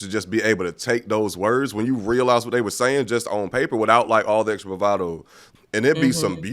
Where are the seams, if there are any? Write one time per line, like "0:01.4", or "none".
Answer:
0:05.4